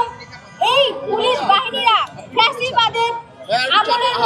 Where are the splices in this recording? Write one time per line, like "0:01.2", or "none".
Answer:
none